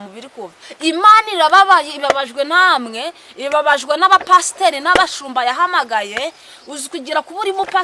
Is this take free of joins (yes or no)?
yes